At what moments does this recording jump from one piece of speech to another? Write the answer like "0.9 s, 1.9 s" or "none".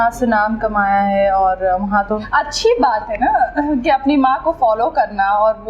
2.2 s